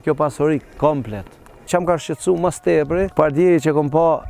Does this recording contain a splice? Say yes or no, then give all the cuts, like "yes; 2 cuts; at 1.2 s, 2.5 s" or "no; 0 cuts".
yes; 2 cuts; at 1.6 s, 3.1 s